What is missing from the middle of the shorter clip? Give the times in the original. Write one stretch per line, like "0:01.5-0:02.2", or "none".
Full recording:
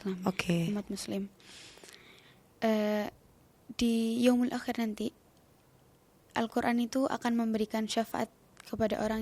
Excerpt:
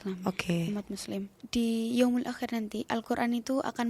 0:01.4-0:03.6
0:05.1-0:06.3